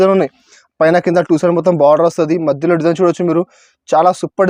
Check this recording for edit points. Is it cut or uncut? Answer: uncut